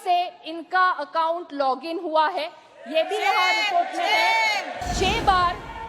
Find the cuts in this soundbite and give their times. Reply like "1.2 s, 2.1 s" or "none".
4.8 s

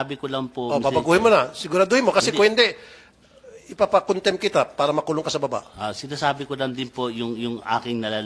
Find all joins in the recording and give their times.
none

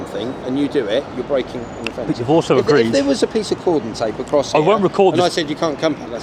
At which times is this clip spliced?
none

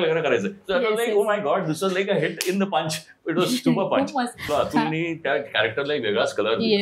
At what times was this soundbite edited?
4.4 s

